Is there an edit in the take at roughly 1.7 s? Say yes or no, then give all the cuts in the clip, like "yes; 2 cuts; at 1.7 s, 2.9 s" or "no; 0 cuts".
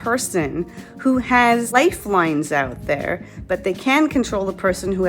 yes; 1 cut; at 1.7 s